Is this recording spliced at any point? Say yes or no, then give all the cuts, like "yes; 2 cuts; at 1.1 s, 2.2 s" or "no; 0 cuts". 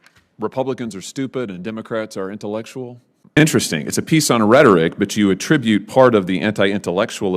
yes; 1 cut; at 3.4 s